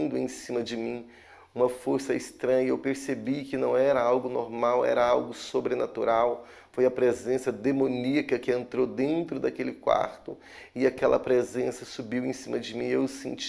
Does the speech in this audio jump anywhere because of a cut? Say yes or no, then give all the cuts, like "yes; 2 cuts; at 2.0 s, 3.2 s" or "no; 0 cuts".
no; 0 cuts